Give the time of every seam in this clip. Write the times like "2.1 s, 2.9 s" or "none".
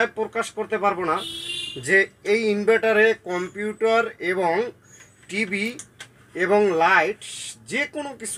none